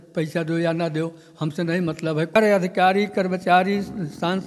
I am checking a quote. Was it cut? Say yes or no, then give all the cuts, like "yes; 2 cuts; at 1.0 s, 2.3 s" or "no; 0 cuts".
yes; 1 cut; at 2.4 s